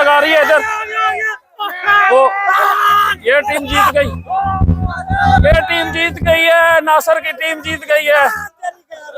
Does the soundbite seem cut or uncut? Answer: uncut